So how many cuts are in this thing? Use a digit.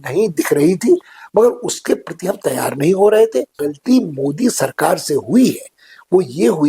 1